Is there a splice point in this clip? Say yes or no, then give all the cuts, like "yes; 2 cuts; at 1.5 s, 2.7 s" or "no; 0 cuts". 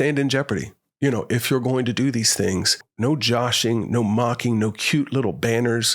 yes; 1 cut; at 2.8 s